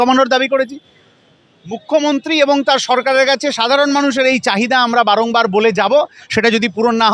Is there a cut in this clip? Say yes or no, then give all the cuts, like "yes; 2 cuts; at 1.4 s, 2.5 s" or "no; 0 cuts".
no; 0 cuts